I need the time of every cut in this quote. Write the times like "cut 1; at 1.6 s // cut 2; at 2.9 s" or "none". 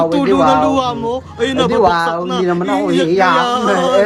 none